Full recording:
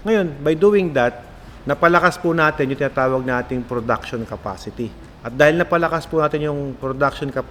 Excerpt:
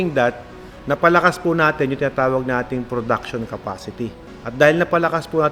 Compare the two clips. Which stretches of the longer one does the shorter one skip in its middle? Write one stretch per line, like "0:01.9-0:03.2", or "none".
none